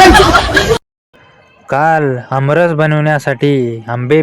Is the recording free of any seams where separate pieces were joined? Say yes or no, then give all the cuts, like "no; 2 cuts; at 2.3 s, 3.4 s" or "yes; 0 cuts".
no; 1 cut; at 0.9 s